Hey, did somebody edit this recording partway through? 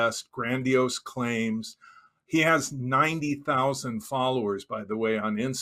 no; 0 cuts

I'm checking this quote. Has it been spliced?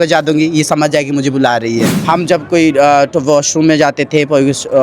yes; 1 cut; at 1.9 s

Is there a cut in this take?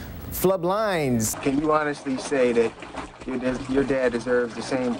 yes; 1 cut; at 1.3 s

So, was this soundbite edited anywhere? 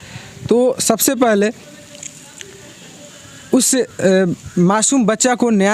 no; 0 cuts

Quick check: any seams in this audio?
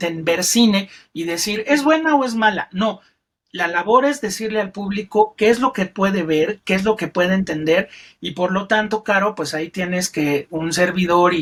no; 0 cuts

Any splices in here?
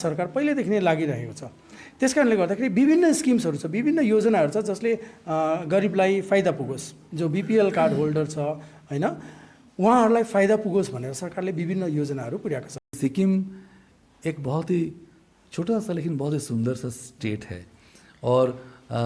yes; 1 cut; at 12.8 s

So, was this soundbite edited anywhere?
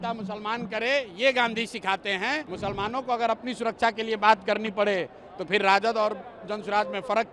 yes; 1 cut; at 2.5 s

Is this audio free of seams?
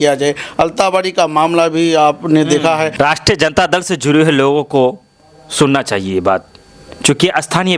no; 1 cut; at 2.9 s

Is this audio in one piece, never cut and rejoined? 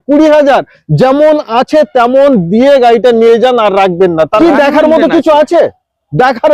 no; 1 cut; at 4.3 s

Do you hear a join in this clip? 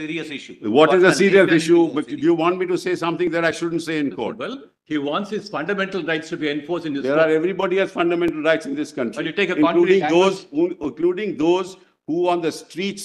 no; 0 cuts

